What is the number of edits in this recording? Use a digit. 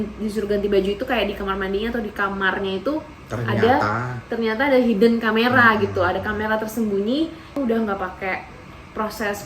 1